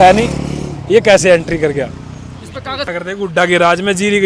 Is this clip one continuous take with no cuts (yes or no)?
no